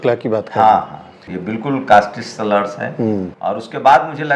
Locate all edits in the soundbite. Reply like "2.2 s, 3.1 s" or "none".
1.3 s, 3.3 s